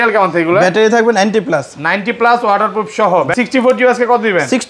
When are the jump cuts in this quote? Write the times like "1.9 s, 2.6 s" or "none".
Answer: 3.3 s